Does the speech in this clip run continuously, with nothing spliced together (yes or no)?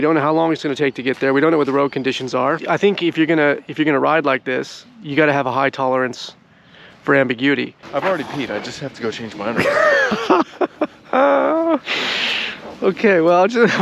no